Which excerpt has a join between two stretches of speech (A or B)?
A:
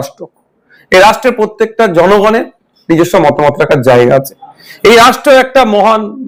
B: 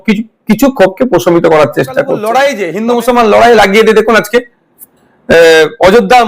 B